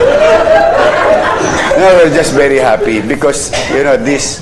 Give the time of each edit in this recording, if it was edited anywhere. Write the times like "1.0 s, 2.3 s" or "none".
1.6 s